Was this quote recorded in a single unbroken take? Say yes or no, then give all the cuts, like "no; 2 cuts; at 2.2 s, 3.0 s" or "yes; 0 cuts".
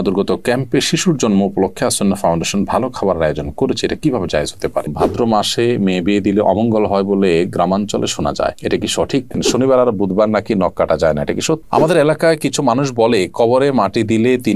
no; 3 cuts; at 4.9 s, 9.4 s, 11.6 s